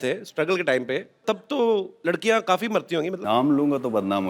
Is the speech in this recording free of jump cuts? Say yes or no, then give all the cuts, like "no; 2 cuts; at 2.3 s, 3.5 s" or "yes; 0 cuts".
no; 3 cuts; at 1.2 s, 1.9 s, 3.2 s